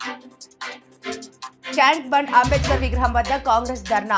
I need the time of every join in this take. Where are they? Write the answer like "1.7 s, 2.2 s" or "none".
1.8 s